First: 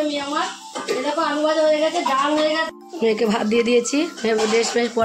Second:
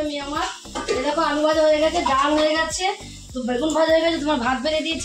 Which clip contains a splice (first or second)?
first